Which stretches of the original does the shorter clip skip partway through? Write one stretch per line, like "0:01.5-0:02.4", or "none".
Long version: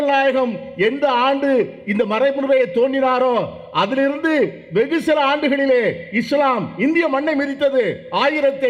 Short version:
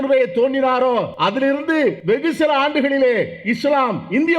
0:03.5-0:03.7
0:04.5-0:04.7